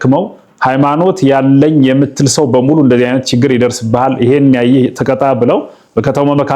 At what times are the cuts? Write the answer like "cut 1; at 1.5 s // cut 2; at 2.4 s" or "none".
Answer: none